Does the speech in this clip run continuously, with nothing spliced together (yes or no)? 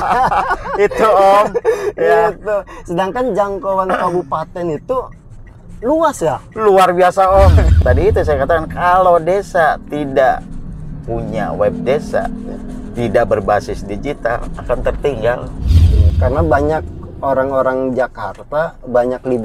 no